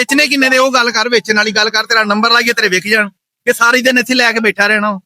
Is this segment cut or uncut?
uncut